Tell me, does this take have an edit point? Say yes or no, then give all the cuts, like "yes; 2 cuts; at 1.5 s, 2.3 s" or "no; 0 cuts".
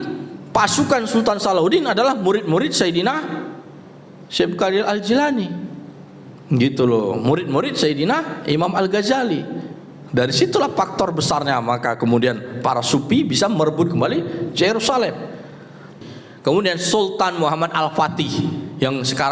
yes; 1 cut; at 16.0 s